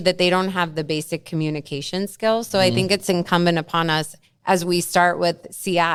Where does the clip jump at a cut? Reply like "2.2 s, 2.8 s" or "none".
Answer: none